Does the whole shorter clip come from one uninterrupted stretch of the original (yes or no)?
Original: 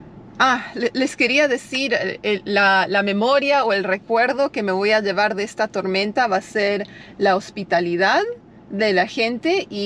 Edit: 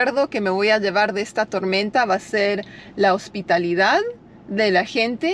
yes